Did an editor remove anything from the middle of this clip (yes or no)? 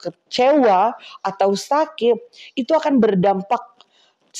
no